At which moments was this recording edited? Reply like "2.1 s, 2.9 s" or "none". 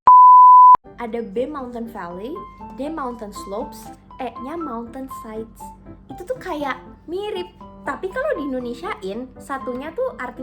0.9 s